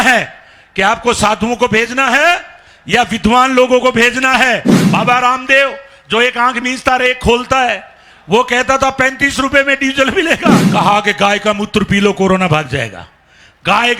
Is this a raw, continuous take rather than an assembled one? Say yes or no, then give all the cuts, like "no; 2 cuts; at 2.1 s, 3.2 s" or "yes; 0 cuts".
no; 2 cuts; at 4.8 s, 10.6 s